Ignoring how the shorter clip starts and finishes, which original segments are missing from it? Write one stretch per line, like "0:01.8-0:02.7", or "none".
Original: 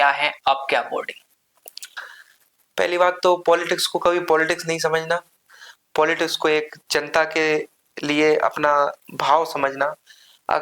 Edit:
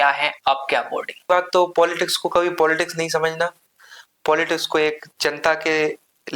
0:01.3-0:03.0